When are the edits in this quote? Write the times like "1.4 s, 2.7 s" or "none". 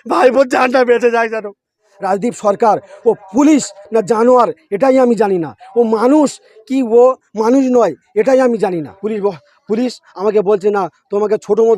1.9 s, 8.9 s